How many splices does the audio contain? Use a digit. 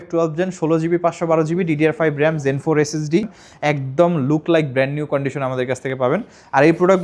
1